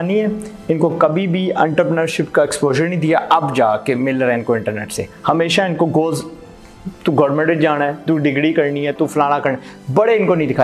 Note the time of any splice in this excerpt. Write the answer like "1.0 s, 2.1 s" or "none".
none